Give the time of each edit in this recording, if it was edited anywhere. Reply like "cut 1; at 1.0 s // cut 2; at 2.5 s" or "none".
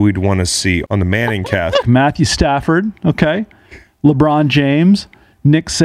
cut 1; at 0.8 s // cut 2; at 1.8 s